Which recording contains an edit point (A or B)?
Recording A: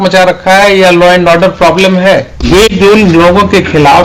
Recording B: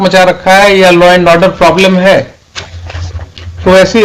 A